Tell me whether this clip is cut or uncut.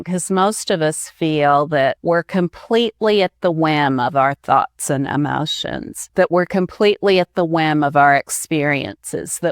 cut